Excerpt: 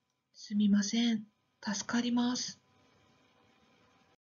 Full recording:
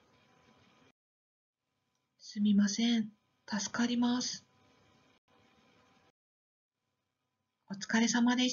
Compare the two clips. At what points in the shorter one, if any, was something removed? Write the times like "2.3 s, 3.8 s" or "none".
3.3 s